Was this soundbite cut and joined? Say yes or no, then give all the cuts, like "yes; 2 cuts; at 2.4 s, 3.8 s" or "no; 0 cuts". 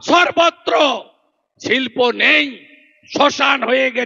no; 0 cuts